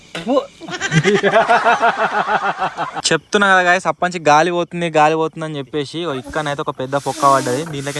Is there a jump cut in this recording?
yes; 1 cut; at 3.0 s

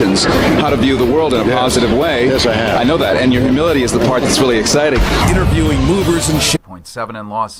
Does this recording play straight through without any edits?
yes; 0 cuts

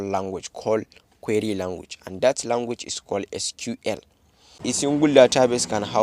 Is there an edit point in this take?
yes; 1 cut; at 4.6 s

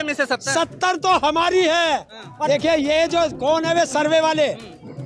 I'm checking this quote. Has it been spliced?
yes; 1 cut; at 2.5 s

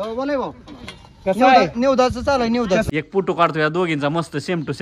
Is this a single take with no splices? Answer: no; 1 cut; at 2.9 s

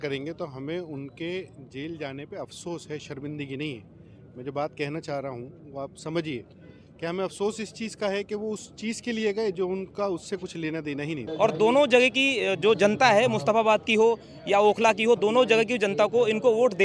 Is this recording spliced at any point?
yes; 1 cut; at 11.2 s

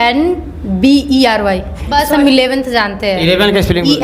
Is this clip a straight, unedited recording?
no; 1 cut; at 2.0 s

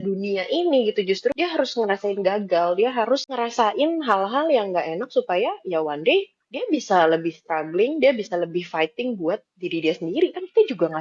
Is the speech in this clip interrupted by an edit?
yes; 2 cuts; at 1.3 s, 3.3 s

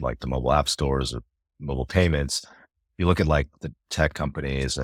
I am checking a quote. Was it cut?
no; 0 cuts

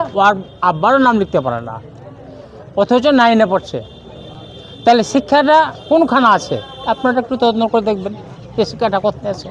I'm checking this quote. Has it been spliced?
no; 0 cuts

